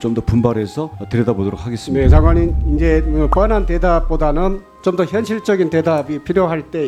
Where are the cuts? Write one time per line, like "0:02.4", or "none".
none